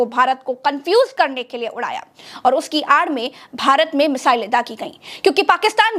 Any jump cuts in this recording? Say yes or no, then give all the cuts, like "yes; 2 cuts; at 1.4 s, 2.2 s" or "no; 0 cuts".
no; 0 cuts